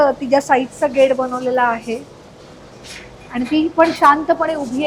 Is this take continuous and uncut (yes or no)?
yes